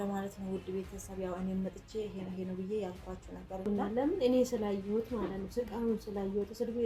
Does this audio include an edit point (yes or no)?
yes